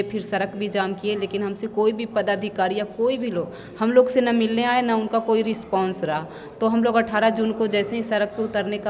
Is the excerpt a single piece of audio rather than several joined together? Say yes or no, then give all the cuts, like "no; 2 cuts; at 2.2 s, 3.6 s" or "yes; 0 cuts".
yes; 0 cuts